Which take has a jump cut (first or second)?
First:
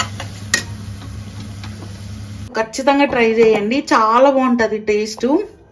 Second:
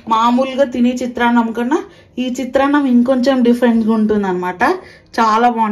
first